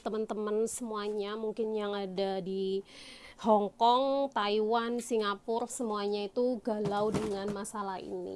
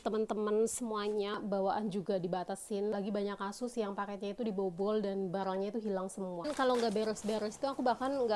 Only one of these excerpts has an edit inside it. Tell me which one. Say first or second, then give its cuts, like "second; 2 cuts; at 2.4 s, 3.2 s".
second; 3 cuts; at 1.4 s, 2.9 s, 6.5 s